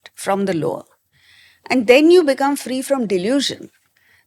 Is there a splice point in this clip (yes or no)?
no